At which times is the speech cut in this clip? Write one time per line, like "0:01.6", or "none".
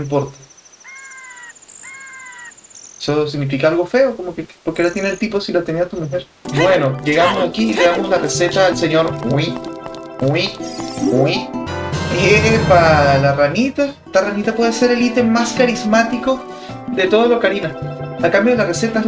0:06.4
0:11.7